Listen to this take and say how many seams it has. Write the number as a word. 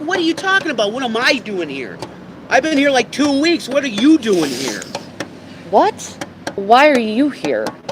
one